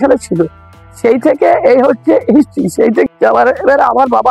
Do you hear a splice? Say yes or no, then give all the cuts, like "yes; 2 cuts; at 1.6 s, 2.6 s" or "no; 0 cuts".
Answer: yes; 1 cut; at 3.1 s